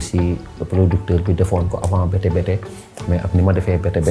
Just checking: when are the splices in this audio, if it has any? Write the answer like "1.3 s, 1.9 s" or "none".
none